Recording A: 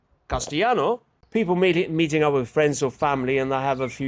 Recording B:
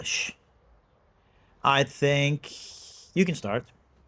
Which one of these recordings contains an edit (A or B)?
A